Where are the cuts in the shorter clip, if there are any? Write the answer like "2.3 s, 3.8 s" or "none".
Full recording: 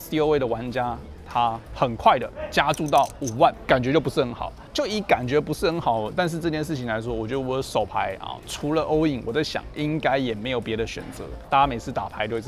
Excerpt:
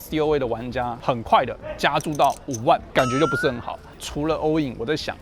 1.0 s, 3.8 s

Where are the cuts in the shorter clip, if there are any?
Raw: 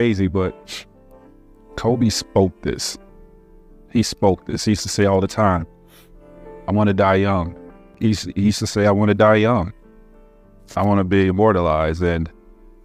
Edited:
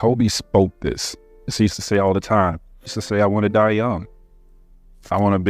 1.4 s, 3.0 s

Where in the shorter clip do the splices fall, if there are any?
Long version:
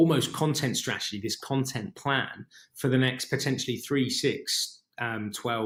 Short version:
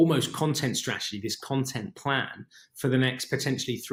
none

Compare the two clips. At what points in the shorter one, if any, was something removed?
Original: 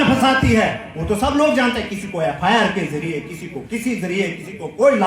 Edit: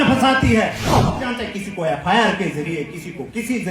1.2 s

